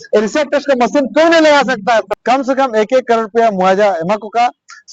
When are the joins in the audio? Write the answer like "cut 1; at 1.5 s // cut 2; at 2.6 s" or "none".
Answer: cut 1; at 2.1 s